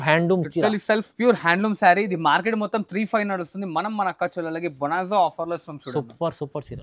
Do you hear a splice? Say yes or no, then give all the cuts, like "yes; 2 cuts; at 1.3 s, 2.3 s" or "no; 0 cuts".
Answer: no; 0 cuts